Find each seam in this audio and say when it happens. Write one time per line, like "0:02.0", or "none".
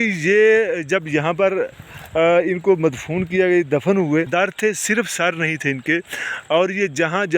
0:04.3